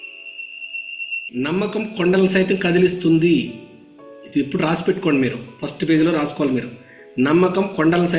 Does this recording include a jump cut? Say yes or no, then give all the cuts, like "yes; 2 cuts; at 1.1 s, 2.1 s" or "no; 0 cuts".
yes; 1 cut; at 1.2 s